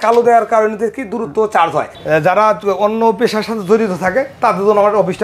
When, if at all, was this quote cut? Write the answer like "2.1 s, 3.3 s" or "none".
1.9 s